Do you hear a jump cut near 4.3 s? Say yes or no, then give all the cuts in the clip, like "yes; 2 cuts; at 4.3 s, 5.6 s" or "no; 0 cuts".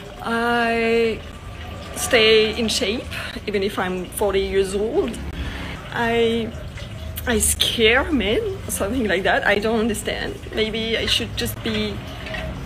no; 1 cut; at 5.7 s